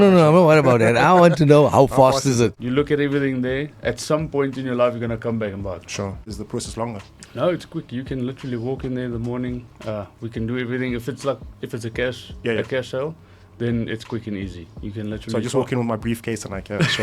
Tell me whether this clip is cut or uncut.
cut